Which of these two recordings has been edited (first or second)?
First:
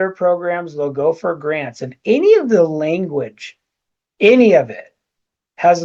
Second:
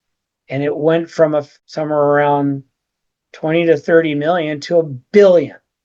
second